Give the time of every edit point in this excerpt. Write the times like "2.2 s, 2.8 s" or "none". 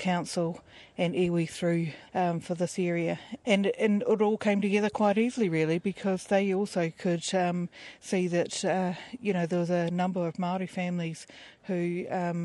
2.0 s, 3.3 s, 11.4 s